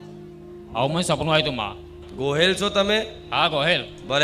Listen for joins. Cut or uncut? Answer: cut